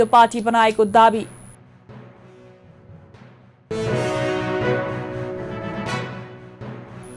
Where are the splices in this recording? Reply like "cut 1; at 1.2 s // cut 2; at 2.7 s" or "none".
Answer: none